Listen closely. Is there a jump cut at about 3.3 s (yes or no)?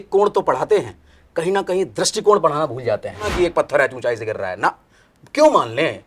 yes